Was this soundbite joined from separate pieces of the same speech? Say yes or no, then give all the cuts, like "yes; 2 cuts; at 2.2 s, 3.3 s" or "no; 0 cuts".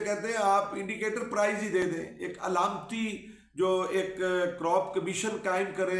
no; 0 cuts